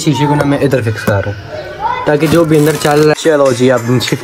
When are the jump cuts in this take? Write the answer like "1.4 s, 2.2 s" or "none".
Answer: 3.1 s